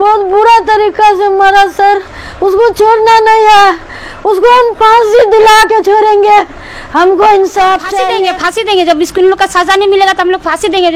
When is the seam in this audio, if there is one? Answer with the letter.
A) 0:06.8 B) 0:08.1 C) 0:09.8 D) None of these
B